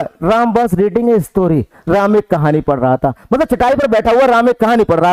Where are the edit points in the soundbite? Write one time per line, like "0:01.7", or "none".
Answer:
none